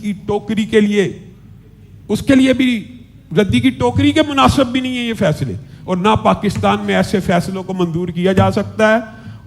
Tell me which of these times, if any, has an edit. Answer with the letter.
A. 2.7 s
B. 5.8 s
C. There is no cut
C